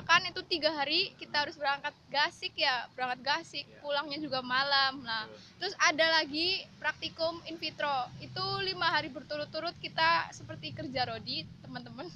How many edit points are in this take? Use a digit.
0